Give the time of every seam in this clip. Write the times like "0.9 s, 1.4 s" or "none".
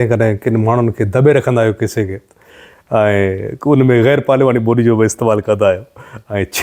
none